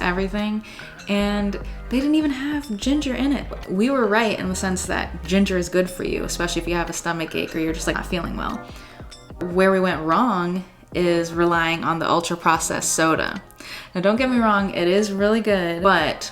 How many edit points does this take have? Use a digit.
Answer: 1